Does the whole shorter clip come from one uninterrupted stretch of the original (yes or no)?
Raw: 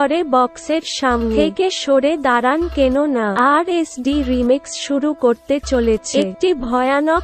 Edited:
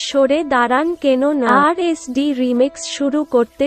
no